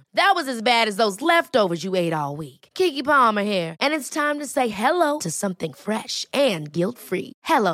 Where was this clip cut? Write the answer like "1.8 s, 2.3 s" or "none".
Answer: none